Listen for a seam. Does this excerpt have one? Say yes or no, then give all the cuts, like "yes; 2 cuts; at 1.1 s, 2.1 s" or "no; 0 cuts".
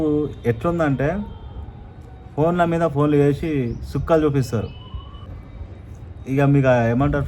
yes; 1 cut; at 5.4 s